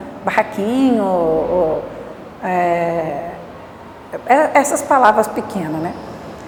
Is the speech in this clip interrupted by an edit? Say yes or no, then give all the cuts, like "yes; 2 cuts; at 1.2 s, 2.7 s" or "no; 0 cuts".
no; 0 cuts